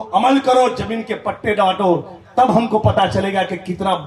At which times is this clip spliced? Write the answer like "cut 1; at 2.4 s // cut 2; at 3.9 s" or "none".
none